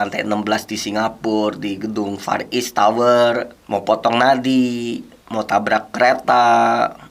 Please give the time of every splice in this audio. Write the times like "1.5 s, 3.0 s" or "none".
none